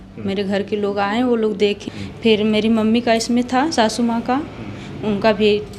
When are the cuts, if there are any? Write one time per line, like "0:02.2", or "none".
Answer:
0:01.8